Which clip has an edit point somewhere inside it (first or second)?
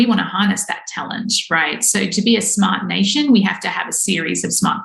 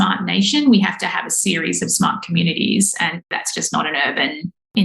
second